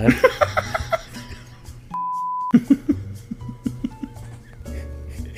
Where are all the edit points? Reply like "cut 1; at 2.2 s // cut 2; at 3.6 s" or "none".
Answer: cut 1; at 2.2 s